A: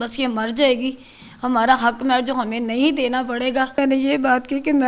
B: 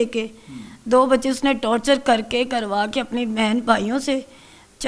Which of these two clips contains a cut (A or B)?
A